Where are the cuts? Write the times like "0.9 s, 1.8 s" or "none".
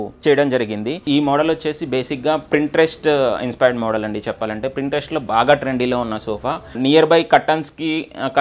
1.0 s, 6.8 s